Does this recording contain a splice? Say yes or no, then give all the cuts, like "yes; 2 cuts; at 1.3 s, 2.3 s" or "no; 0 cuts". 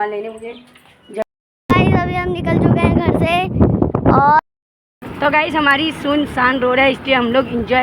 yes; 2 cuts; at 1.2 s, 4.4 s